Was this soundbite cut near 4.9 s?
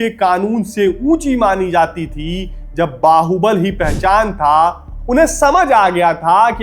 yes; 1 cut; at 4.9 s

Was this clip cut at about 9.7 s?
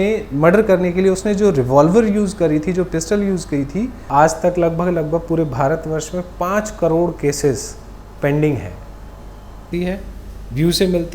yes; 2 cuts; at 4.0 s, 9.7 s

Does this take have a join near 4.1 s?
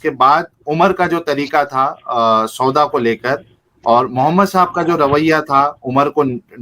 no; 0 cuts

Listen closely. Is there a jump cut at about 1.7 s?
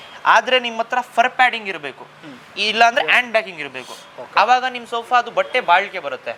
no; 0 cuts

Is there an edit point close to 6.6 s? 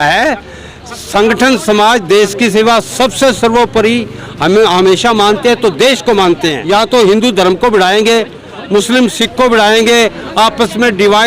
yes; 1 cut; at 6.6 s

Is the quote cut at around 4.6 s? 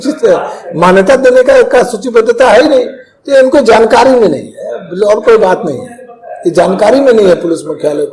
no; 0 cuts

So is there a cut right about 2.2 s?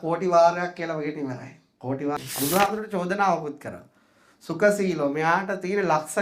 yes; 1 cut; at 2.2 s

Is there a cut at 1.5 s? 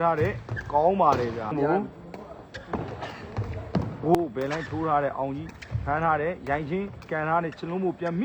yes; 2 cuts; at 1.5 s, 4.1 s

